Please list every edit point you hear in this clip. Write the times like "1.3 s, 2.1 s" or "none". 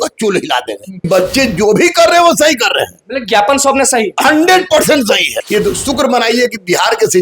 1.0 s, 5.4 s

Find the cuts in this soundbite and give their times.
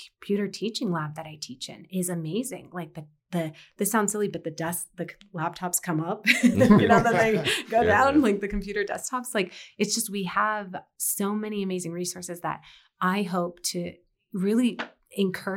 none

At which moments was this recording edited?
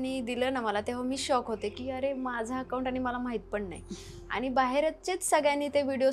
none

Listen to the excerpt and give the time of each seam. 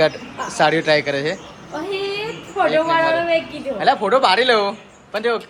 none

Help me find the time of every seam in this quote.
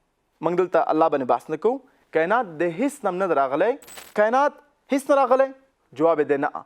4.0 s

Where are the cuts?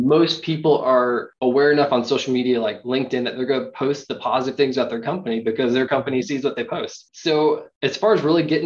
1.3 s

